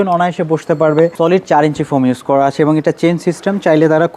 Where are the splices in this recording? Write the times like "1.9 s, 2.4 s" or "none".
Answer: 1.1 s